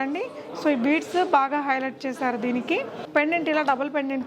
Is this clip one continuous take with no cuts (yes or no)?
no